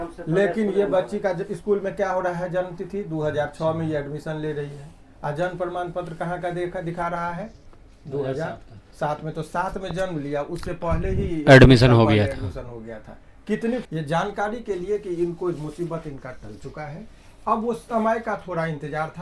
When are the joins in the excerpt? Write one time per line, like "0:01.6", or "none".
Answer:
0:13.9